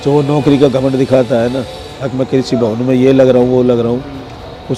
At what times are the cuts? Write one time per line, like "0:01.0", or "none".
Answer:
none